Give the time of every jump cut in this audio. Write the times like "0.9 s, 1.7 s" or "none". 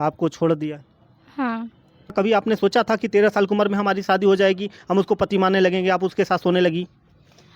2.1 s